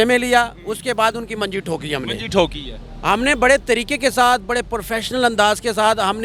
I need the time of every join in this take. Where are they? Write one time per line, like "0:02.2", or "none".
none